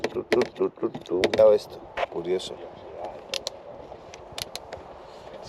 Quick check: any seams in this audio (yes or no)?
yes